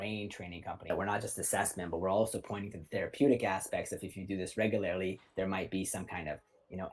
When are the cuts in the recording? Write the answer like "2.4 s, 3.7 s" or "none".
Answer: 0.9 s